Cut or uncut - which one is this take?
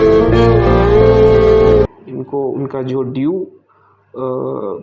uncut